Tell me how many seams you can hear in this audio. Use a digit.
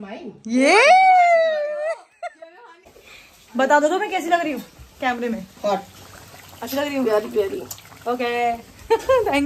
1